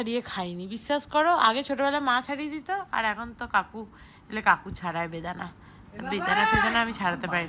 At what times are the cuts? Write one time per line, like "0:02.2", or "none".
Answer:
none